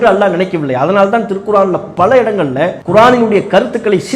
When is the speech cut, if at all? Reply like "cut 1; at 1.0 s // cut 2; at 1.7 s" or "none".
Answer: cut 1; at 2.8 s